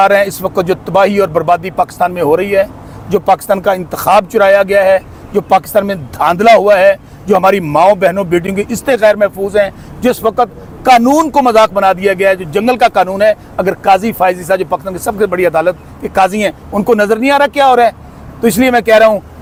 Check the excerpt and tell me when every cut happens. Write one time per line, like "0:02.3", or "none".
none